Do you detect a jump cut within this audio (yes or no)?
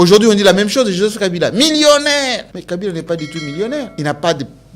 yes